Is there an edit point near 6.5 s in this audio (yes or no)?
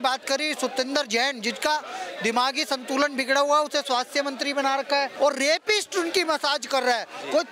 no